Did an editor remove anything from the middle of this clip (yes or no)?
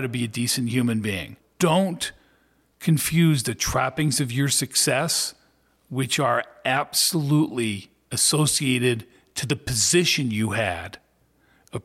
yes